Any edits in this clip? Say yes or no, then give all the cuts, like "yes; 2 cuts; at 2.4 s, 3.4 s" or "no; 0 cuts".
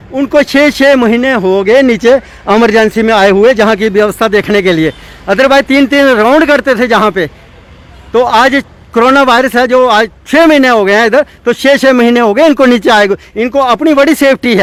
no; 0 cuts